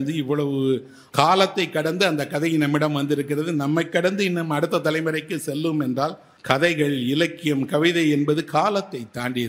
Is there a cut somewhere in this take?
yes; 2 cuts; at 1.0 s, 6.3 s

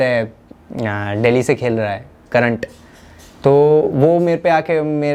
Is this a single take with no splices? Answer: yes; 0 cuts

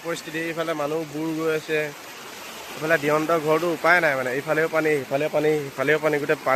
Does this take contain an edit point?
no; 0 cuts

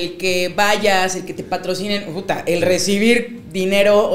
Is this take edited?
no; 0 cuts

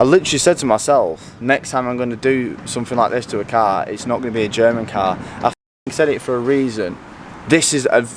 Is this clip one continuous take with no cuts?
yes; 0 cuts

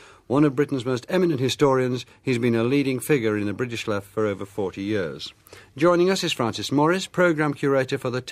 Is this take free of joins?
yes; 0 cuts

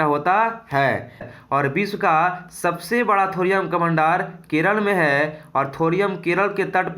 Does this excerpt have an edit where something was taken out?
yes; 1 cut; at 1.3 s

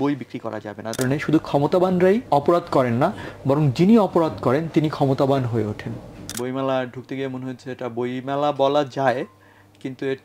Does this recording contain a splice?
yes; 3 cuts; at 1.0 s, 2.2 s, 6.3 s

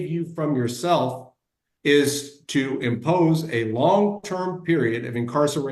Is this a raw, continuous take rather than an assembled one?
yes; 0 cuts

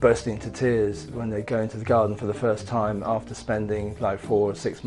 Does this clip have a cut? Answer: no; 0 cuts

